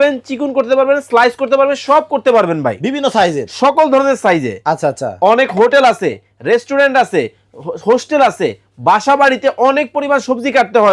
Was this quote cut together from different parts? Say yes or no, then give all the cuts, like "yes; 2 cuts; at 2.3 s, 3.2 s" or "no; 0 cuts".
no; 0 cuts